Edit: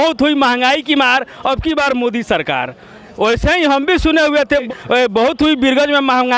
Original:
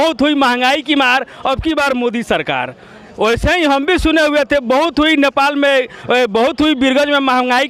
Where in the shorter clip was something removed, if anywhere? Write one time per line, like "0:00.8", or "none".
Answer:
0:04.7